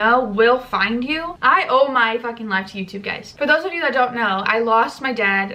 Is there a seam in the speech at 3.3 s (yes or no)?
yes